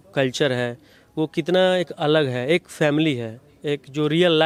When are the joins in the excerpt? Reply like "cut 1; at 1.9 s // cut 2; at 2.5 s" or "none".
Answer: none